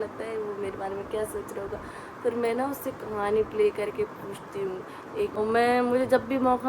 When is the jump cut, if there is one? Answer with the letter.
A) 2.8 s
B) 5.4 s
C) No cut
B